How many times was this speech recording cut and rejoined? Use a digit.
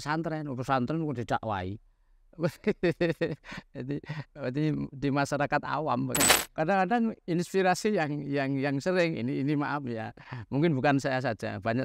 1